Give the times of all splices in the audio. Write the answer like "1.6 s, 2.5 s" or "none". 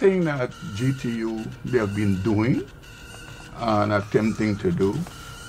none